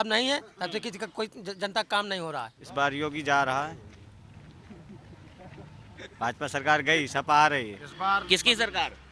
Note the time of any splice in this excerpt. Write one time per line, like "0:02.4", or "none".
0:02.6
0:07.8